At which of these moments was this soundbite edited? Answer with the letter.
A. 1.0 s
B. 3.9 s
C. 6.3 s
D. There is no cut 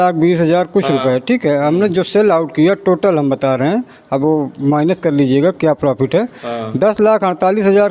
D